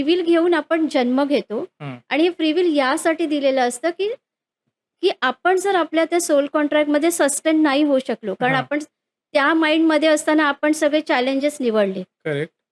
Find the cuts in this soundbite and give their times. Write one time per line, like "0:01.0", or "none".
none